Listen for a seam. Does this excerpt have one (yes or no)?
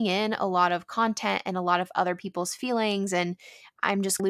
no